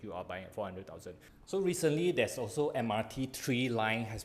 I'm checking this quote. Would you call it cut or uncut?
cut